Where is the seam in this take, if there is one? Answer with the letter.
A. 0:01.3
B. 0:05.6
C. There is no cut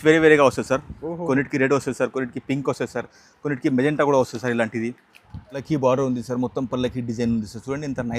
B